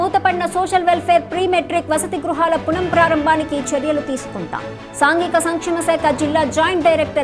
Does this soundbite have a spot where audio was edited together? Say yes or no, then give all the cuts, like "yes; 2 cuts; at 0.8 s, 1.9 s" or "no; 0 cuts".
no; 0 cuts